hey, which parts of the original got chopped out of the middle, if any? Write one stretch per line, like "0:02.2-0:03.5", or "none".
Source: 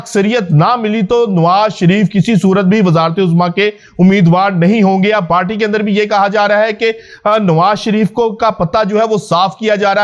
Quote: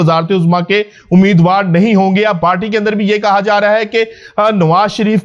none